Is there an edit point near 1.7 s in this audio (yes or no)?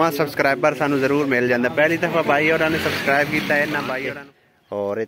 no